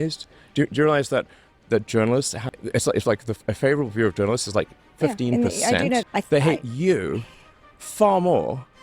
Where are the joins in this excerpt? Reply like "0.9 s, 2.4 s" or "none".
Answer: 2.4 s, 6.2 s